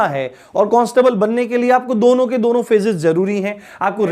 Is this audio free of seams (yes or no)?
yes